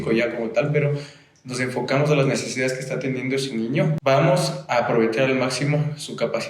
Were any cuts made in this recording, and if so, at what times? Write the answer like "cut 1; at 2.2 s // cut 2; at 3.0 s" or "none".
cut 1; at 4.0 s